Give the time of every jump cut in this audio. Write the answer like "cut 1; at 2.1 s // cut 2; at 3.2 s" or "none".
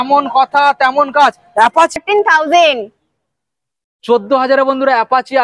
cut 1; at 2.0 s